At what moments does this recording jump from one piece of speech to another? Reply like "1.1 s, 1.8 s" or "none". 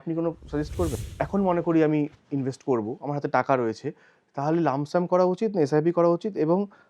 0.9 s

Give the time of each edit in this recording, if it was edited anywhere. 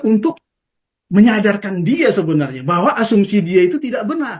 none

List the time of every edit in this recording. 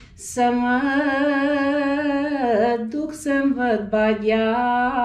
none

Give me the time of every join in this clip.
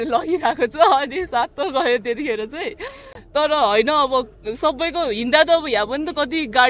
none

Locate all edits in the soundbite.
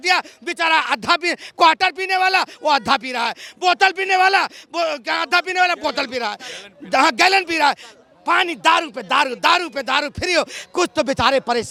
none

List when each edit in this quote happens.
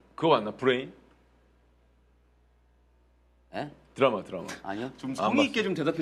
none

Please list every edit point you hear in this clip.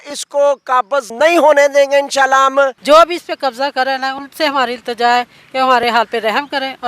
1.1 s, 2.8 s

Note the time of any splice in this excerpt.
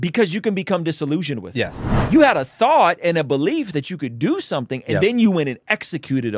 2.0 s

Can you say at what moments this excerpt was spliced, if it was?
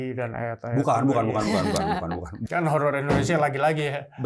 2.3 s

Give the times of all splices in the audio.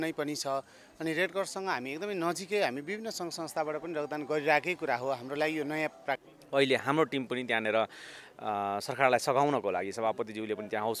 6.3 s

